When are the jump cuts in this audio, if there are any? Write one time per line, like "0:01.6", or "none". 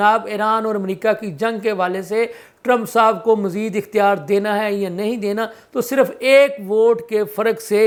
none